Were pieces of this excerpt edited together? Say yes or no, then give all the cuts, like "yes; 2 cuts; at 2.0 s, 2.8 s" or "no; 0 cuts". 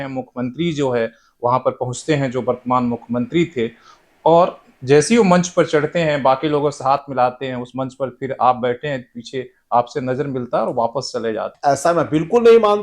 yes; 1 cut; at 11.5 s